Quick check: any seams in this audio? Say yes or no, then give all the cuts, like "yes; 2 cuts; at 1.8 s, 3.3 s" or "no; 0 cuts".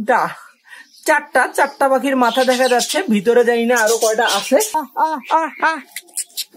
yes; 1 cut; at 4.8 s